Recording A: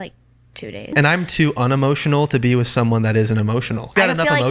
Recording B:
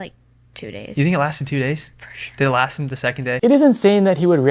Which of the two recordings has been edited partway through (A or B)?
A